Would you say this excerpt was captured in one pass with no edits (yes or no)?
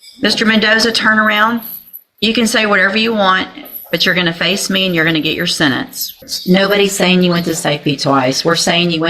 no